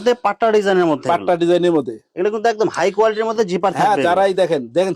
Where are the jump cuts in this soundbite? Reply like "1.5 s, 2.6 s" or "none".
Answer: none